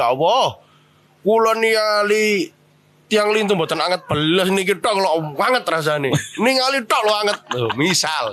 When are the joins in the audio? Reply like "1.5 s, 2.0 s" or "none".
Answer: none